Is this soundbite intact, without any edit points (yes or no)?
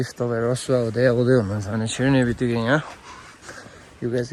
yes